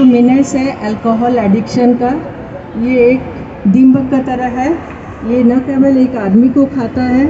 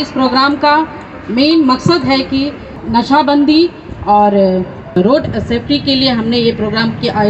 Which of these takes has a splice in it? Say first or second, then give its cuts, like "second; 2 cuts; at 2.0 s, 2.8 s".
second; 2 cuts; at 2.7 s, 5.0 s